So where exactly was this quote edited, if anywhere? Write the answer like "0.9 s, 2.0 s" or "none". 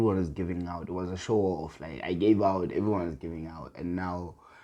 none